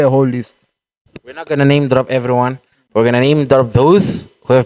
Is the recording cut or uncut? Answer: uncut